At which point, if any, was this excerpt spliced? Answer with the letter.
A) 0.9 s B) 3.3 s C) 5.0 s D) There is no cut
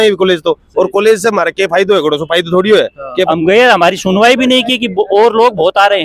B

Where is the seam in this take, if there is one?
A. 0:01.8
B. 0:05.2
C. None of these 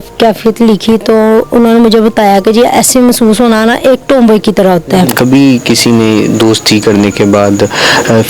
B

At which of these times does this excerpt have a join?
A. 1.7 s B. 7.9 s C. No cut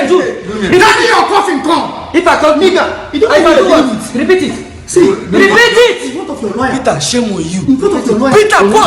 B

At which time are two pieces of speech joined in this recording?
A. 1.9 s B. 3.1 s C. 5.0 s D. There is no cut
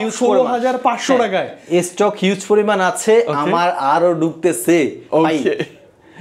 D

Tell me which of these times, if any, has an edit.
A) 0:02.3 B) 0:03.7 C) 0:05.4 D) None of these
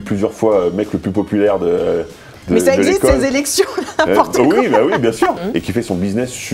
C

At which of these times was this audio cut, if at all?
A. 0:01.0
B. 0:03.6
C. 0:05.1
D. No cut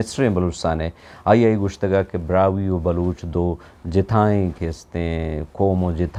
D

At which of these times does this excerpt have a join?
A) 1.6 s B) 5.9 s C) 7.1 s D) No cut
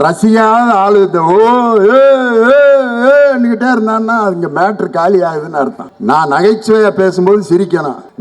D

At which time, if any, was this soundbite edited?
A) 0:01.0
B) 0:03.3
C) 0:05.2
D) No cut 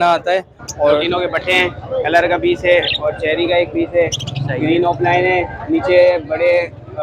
A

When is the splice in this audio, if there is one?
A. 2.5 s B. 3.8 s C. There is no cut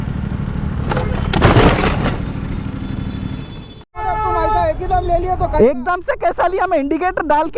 B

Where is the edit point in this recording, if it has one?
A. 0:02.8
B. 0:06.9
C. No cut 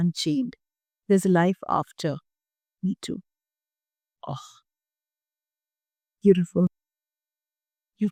C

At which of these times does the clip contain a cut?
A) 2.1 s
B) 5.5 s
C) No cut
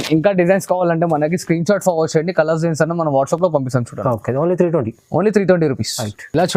C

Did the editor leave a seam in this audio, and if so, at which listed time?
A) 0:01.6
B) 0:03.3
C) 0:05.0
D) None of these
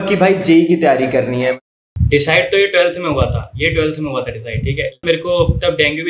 C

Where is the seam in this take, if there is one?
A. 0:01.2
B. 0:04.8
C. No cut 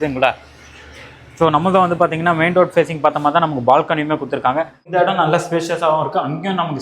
B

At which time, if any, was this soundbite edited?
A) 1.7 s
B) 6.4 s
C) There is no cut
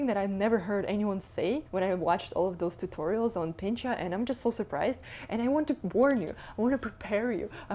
A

